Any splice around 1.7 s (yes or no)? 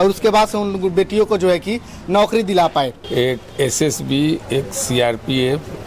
no